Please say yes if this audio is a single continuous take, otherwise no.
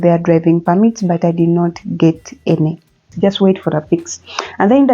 no